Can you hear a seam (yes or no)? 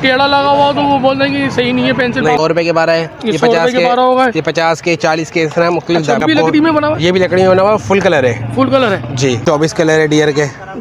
yes